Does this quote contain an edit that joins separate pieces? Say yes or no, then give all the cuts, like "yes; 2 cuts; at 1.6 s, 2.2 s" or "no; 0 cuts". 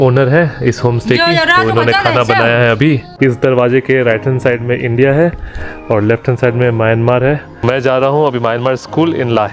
yes; 2 cuts; at 3.1 s, 7.6 s